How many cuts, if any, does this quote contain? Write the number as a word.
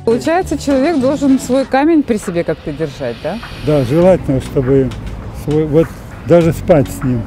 zero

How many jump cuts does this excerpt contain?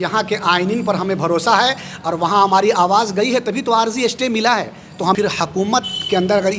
one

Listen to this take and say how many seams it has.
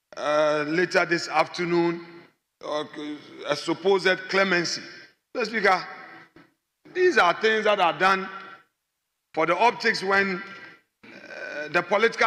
zero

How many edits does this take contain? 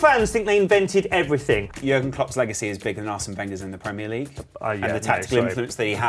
one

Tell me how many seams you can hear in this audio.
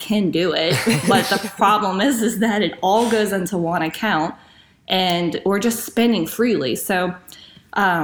zero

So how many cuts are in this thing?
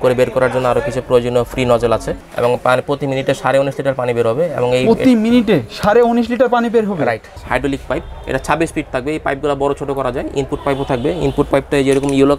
two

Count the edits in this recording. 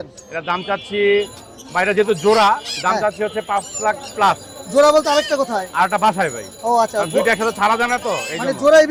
zero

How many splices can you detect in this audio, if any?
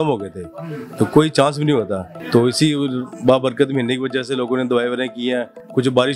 zero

